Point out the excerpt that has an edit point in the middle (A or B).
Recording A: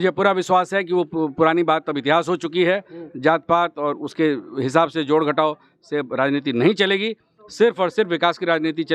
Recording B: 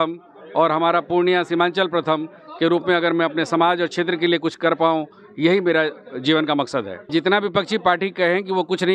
B